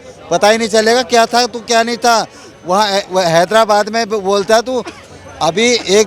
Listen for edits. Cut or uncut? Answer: uncut